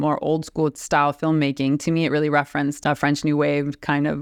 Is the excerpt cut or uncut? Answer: uncut